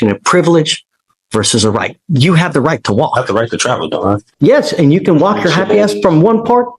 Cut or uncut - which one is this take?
cut